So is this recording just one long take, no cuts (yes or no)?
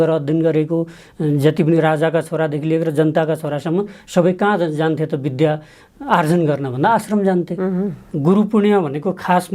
no